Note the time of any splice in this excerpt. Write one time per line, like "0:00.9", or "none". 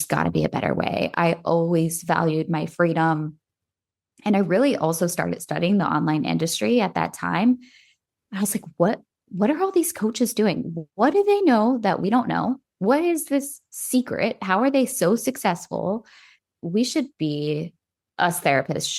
0:16.6